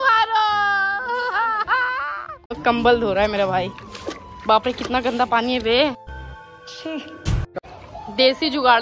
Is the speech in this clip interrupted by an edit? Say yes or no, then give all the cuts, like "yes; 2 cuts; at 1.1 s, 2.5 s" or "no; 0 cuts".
yes; 2 cuts; at 2.6 s, 7.6 s